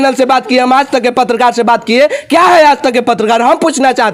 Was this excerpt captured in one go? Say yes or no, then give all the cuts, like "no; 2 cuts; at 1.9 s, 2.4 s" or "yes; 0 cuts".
yes; 0 cuts